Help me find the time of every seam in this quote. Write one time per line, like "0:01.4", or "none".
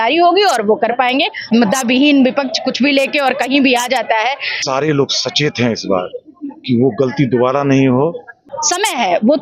0:01.5
0:04.5
0:08.4

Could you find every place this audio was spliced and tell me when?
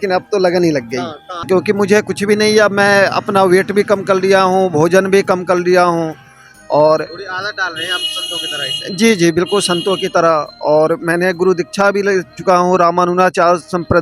0:01.5

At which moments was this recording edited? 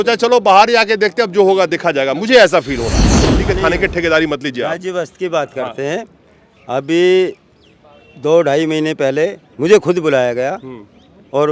0:03.2

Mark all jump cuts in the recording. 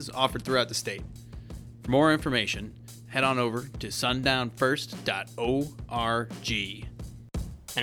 0:06.8

